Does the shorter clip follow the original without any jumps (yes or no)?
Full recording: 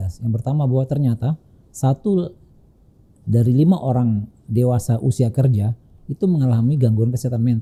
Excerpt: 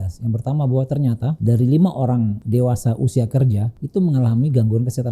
no